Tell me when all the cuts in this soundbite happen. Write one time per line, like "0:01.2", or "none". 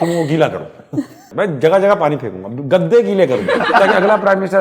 0:01.2
0:03.7